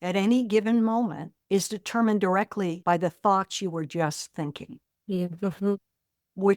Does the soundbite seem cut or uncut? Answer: uncut